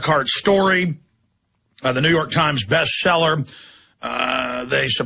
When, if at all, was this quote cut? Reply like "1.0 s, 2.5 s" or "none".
3.7 s